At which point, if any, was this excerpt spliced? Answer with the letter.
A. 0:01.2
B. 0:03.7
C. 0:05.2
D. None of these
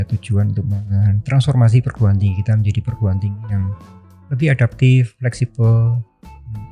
D